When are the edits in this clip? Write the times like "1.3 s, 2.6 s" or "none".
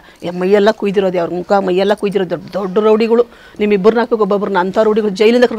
none